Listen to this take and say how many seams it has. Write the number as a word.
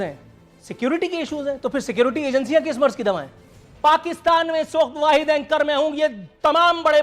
one